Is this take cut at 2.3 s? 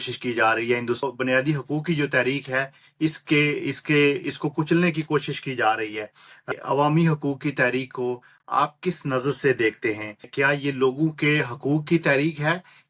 no; 3 cuts; at 1.0 s, 6.5 s, 10.3 s

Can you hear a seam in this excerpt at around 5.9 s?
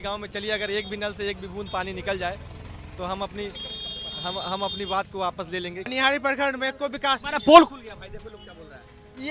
yes; 1 cut; at 5.9 s

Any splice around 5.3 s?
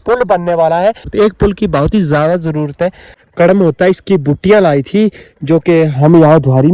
no; 2 cuts; at 1.1 s, 3.1 s

